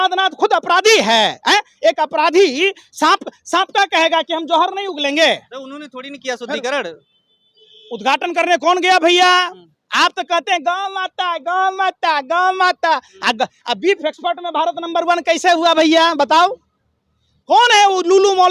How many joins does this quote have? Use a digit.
0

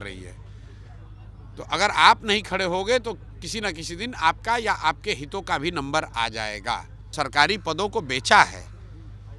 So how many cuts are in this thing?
1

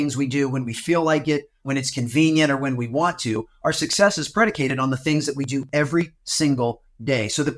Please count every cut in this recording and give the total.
2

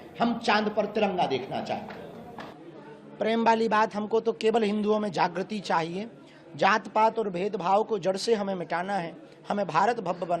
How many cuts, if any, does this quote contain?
1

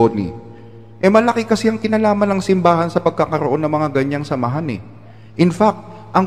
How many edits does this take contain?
1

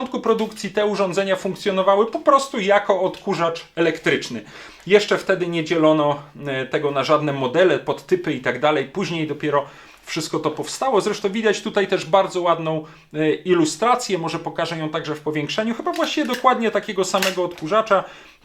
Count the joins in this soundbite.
0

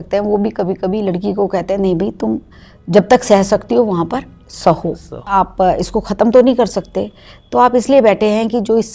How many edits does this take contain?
1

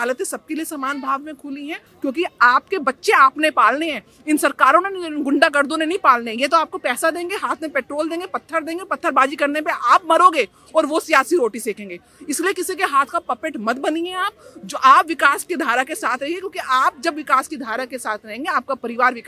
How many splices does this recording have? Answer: 1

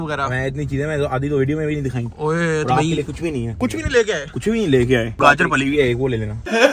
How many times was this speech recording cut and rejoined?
2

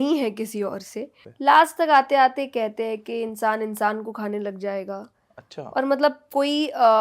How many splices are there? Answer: 1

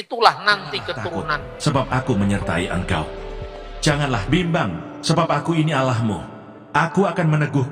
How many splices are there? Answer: 1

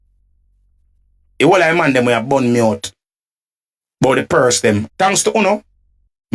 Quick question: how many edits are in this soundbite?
1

